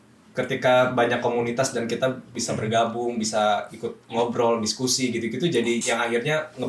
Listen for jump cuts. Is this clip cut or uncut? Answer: cut